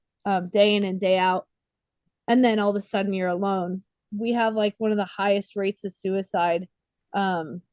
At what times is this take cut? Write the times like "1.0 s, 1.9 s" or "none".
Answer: 4.1 s